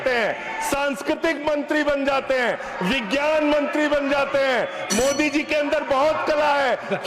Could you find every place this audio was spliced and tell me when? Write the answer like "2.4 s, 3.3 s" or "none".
none